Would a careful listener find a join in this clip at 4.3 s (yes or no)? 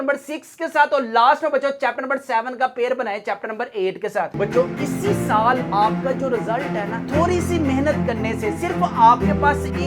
yes